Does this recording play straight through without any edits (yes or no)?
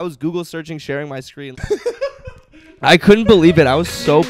no